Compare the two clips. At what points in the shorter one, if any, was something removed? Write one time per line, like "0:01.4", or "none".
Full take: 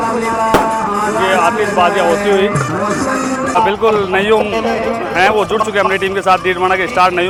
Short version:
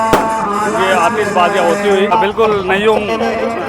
0:02.1